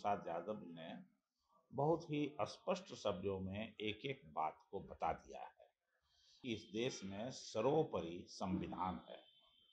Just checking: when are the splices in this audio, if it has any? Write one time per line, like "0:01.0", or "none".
0:06.4